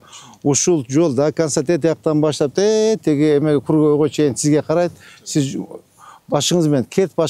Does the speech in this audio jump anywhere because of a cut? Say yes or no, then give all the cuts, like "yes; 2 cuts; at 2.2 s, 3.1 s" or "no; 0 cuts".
no; 0 cuts